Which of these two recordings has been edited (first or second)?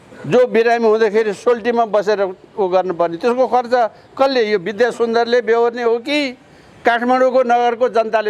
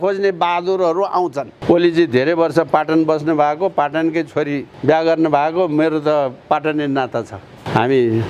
second